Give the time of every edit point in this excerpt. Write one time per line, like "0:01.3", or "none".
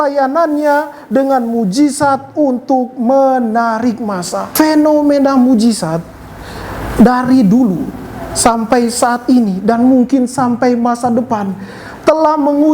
0:04.5

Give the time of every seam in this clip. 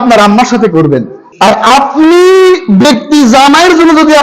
0:01.2

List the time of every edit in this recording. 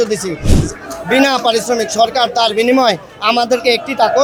none

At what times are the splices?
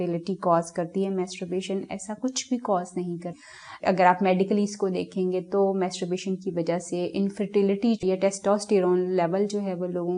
none

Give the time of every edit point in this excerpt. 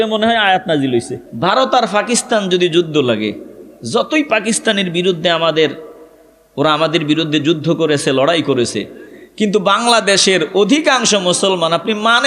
0:01.2

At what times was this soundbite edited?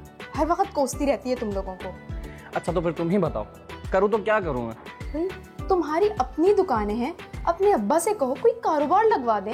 none

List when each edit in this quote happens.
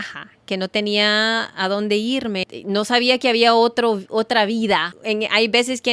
0:02.5
0:04.9

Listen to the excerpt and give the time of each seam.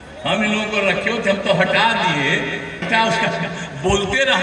0:02.8

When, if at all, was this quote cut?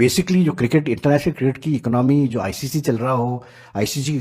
none

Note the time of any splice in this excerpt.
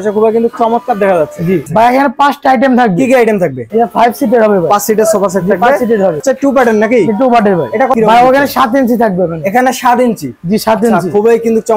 0:01.7
0:03.6
0:06.2
0:07.9

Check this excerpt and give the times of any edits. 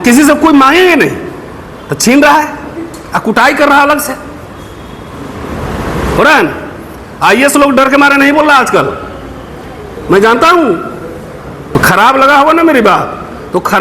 0:11.7

